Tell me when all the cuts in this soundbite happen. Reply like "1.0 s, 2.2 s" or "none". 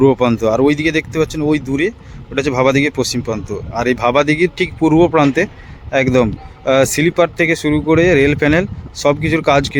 none